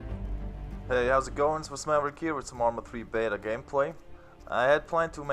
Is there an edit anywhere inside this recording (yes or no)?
no